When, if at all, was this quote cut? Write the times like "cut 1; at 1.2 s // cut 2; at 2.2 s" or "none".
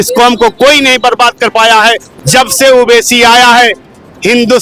cut 1; at 2.1 s